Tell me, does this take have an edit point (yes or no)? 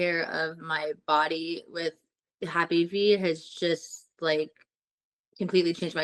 no